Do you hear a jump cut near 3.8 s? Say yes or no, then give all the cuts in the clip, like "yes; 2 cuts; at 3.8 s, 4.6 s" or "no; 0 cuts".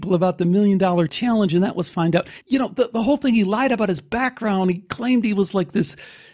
no; 2 cuts; at 1.2 s, 2.3 s